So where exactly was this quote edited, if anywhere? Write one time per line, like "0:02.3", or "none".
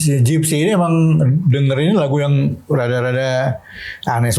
none